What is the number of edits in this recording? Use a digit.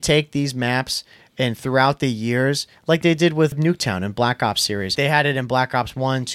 2